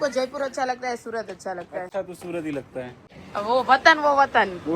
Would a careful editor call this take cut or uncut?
uncut